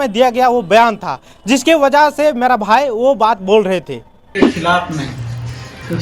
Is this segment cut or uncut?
cut